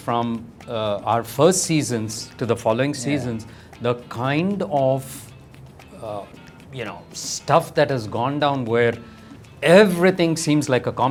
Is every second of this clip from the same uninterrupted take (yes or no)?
yes